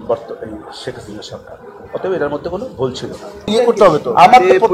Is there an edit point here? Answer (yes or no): yes